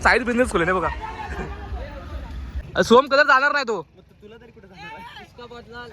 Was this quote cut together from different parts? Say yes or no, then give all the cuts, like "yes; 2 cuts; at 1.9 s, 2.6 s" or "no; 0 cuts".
yes; 1 cut; at 2.6 s